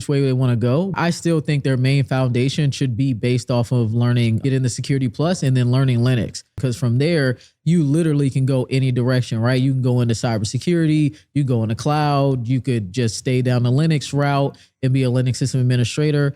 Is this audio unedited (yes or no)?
no